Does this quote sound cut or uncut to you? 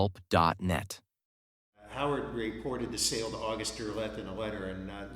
cut